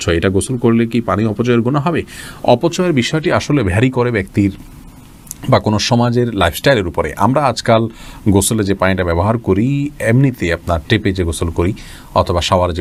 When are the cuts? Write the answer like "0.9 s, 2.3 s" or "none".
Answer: none